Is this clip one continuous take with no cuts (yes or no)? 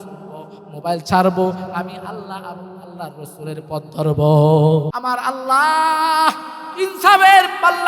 no